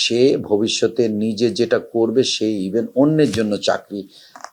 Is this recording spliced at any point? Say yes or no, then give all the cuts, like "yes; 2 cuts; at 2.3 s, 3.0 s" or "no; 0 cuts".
no; 0 cuts